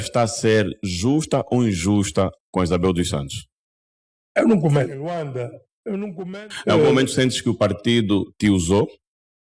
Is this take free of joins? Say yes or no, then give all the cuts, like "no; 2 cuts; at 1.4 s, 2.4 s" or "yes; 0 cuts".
no; 1 cut; at 6.3 s